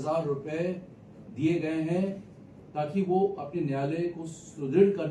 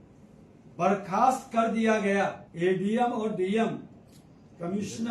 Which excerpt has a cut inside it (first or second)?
second